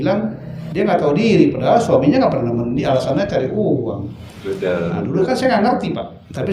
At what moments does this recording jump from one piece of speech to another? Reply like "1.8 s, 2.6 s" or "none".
none

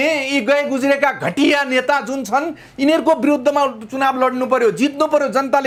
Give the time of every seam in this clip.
none

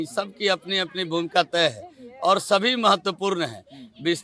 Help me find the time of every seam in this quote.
none

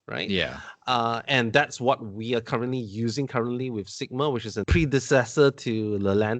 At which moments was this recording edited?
4.6 s

